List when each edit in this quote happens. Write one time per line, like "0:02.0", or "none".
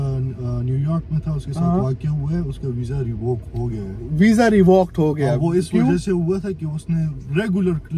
none

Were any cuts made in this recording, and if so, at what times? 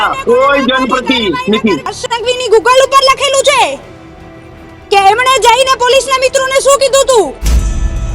0:01.9

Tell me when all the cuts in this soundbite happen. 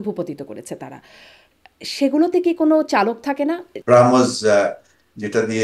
0:03.7

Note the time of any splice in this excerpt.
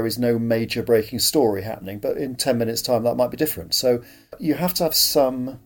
0:04.4

